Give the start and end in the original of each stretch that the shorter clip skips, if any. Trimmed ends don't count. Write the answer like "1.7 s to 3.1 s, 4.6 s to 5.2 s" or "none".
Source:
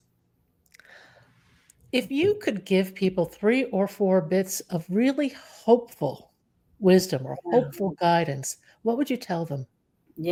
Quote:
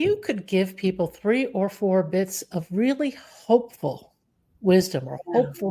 none